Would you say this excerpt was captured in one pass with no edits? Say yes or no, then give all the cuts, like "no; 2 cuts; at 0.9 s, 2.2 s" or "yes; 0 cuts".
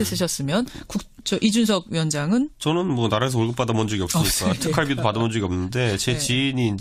yes; 0 cuts